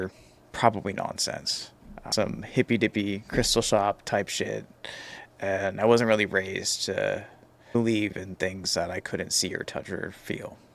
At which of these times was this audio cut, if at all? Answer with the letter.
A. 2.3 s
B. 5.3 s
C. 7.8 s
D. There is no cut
C